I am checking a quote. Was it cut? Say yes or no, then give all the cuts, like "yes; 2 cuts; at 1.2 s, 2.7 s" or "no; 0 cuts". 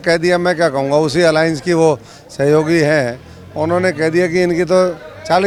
no; 0 cuts